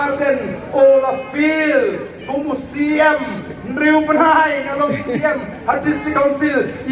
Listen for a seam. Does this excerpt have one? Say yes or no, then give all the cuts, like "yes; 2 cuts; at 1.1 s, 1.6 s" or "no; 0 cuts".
no; 0 cuts